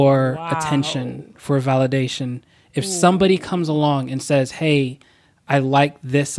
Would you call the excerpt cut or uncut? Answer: uncut